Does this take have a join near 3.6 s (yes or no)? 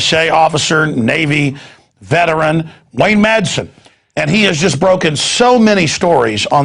no